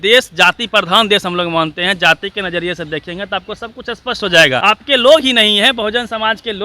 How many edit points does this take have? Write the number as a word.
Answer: one